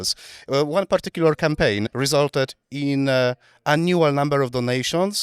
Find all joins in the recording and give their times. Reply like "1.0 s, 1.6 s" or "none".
1.9 s